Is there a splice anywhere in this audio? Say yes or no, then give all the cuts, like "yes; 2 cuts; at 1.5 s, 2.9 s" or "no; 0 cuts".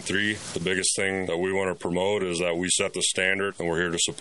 no; 0 cuts